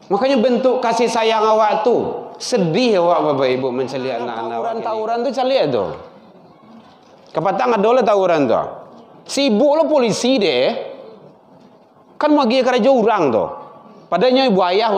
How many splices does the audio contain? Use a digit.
1